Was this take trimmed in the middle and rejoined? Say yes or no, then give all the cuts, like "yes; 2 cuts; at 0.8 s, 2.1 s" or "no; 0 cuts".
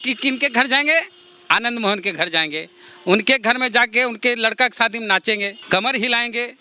yes; 1 cut; at 5.6 s